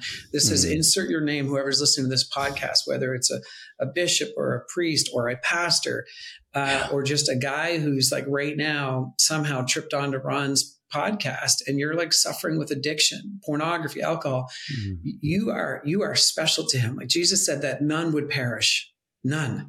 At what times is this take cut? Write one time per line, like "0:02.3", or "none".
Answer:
none